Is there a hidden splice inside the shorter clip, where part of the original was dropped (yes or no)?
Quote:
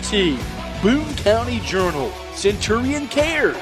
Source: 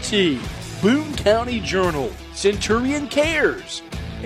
no